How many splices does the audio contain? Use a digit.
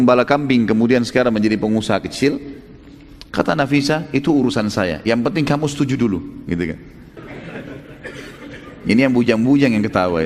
1